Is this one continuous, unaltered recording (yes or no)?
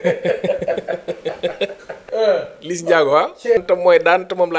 no